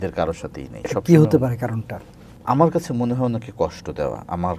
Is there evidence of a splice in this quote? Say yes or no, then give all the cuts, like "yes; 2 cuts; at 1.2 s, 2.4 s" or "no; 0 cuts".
yes; 1 cut; at 2.3 s